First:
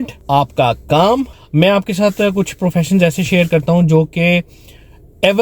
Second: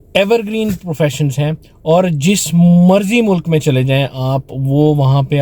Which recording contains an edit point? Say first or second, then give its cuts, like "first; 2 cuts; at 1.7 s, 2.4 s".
first; 1 cut; at 1.3 s